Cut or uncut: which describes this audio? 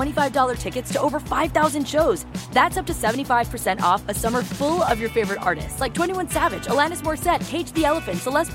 uncut